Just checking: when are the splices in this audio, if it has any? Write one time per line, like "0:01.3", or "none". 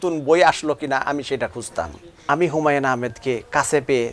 0:02.1

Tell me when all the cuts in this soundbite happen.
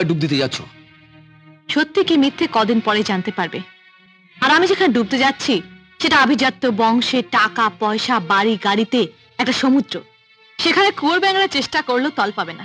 none

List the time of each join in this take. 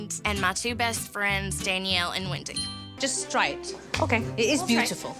0:03.0

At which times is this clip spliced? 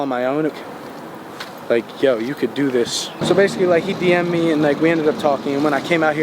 0:03.2

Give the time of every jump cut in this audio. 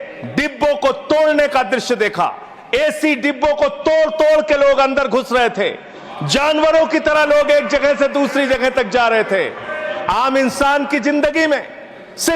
none

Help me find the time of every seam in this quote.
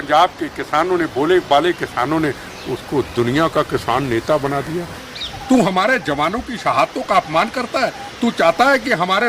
0:05.0

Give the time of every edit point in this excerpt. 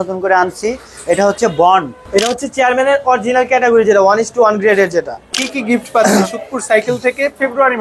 0:02.0
0:05.5

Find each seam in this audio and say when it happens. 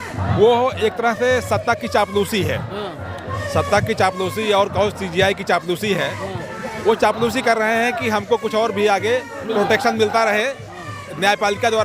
none

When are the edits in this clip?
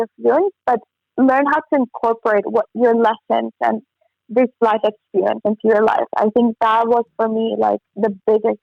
none

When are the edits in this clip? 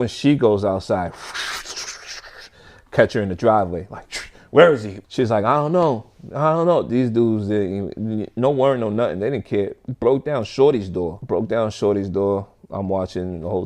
0:04.9

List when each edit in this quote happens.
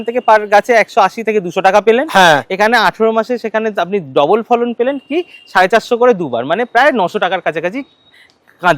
none

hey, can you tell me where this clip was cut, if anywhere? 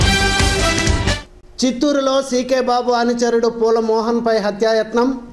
0:01.1

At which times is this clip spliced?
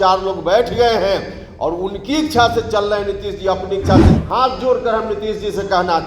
0:04.1

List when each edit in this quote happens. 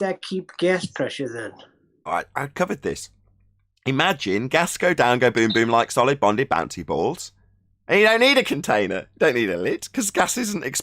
0:02.1

